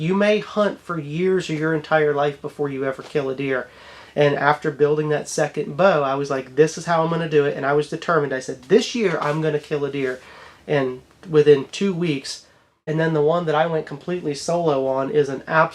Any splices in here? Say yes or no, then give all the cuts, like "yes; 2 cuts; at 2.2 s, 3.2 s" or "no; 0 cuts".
yes; 1 cut; at 12.8 s